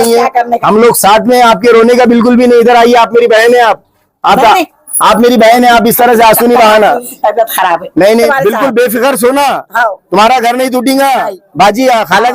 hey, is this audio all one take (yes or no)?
no